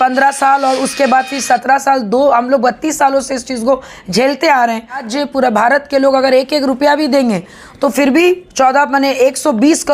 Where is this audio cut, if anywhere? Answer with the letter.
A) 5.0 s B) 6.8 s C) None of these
A